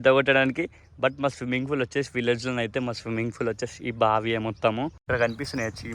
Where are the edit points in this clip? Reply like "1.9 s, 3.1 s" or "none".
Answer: 5.0 s